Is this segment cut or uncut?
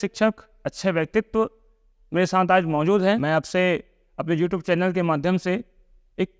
cut